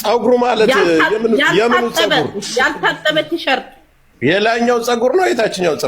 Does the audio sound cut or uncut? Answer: uncut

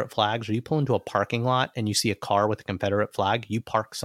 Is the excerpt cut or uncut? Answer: uncut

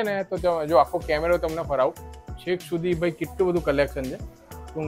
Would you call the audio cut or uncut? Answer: uncut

